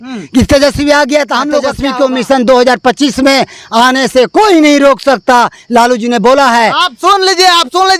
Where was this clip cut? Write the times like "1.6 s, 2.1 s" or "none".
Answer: 1.7 s